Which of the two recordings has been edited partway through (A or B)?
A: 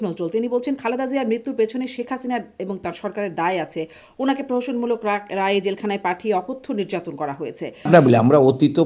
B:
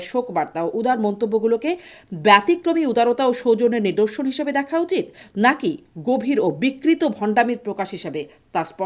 A